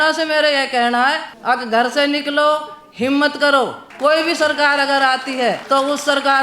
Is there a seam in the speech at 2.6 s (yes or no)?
no